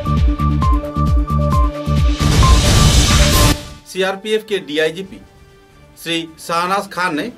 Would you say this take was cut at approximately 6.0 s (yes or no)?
no